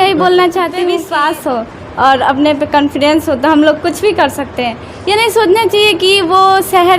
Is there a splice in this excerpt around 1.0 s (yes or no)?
yes